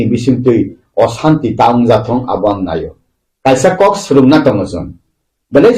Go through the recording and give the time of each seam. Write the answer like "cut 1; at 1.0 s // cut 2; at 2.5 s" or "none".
none